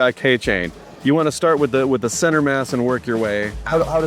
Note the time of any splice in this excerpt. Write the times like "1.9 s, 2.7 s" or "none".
none